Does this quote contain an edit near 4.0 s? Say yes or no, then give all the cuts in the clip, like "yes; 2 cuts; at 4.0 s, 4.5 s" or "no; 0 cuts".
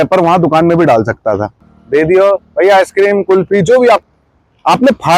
yes; 2 cuts; at 1.6 s, 4.0 s